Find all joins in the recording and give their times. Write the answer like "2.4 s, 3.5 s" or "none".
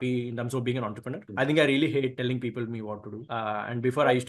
2.1 s, 3.2 s